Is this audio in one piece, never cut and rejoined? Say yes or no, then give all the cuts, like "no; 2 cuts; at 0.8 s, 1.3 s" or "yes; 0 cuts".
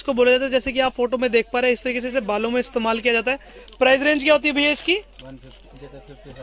yes; 0 cuts